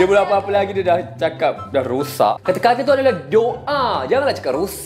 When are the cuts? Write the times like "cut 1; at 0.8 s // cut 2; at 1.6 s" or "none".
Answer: cut 1; at 2.4 s